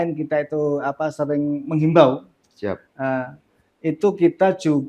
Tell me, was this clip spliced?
no; 0 cuts

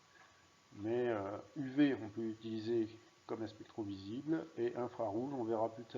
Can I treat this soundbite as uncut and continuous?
no; 1 cut; at 2.0 s

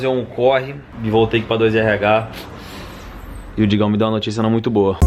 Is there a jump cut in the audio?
no; 0 cuts

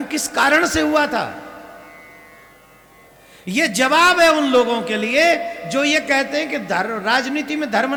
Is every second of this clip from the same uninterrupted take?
yes; 0 cuts

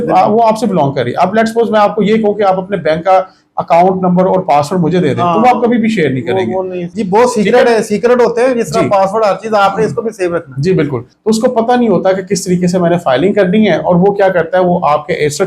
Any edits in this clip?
yes; 2 cuts; at 6.8 s, 11.1 s

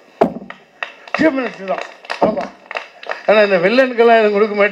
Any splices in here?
no; 0 cuts

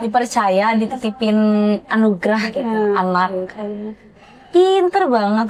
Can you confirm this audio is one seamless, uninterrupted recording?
yes; 0 cuts

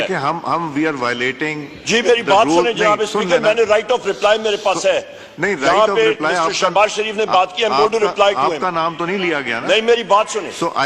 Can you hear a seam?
no; 0 cuts

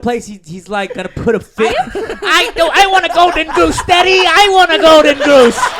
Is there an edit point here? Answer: no; 0 cuts

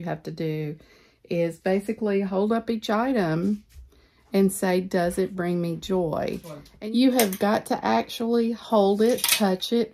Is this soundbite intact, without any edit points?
no; 1 cut; at 6.6 s

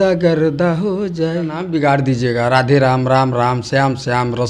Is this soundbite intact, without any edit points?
no; 1 cut; at 1.7 s

